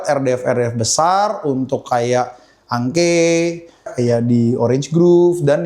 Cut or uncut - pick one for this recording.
cut